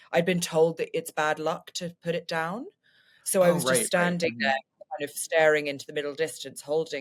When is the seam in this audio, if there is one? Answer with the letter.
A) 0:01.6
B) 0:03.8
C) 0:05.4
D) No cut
D